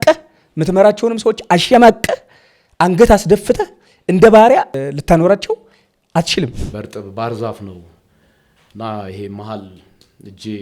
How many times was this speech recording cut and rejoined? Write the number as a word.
two